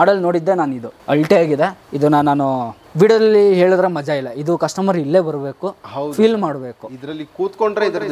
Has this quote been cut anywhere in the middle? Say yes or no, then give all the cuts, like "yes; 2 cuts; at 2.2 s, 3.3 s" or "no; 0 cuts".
yes; 1 cut; at 0.9 s